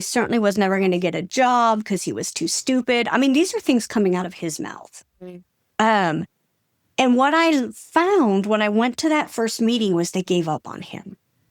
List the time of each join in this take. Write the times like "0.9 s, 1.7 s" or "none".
none